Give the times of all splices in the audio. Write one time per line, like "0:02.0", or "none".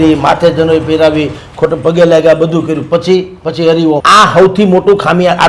0:04.0